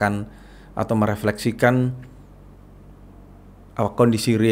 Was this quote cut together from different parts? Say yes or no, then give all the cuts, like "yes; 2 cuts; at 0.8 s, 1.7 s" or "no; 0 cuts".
no; 0 cuts